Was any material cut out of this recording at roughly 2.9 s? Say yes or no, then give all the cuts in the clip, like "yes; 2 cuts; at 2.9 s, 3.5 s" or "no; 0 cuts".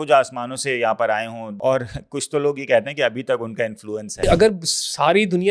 no; 2 cuts; at 1.6 s, 4.2 s